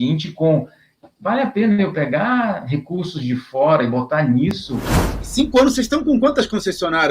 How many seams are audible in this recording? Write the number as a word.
one